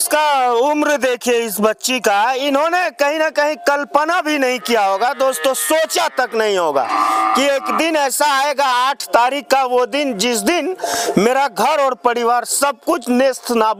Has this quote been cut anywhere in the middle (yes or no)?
no